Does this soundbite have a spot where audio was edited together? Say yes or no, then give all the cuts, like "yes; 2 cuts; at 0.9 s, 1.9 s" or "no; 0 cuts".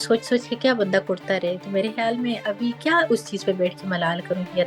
no; 0 cuts